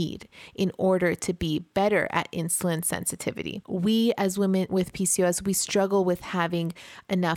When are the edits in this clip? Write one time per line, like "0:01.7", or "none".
0:03.6
0:04.7